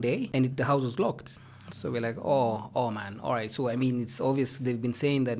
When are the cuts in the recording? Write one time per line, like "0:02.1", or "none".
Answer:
none

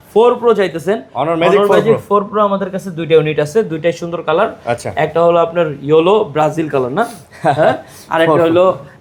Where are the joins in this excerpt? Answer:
none

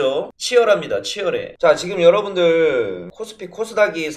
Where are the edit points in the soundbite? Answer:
0:01.5

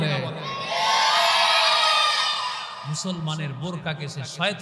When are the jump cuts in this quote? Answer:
0:02.8

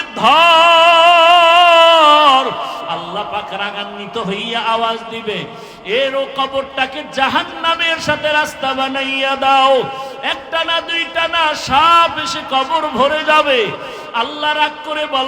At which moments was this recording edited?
0:02.8

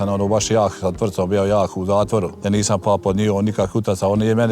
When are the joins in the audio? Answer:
0:02.3

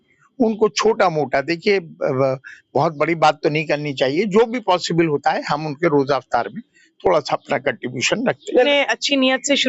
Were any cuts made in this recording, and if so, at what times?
0:08.7

